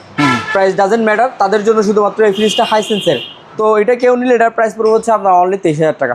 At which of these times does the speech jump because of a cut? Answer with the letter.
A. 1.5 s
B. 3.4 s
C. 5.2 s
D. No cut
B